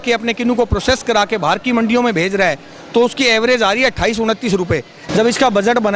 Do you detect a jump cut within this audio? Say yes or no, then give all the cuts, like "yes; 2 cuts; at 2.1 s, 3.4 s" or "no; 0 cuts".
yes; 1 cut; at 5.0 s